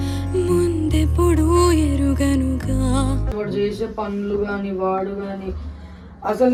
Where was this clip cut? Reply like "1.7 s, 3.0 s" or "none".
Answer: none